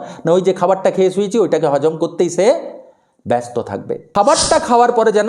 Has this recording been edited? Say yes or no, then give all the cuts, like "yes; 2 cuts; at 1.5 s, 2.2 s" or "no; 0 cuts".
yes; 1 cut; at 4.0 s